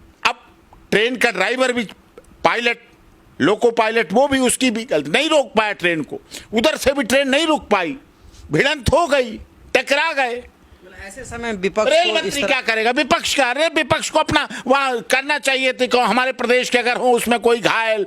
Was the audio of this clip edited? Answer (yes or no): no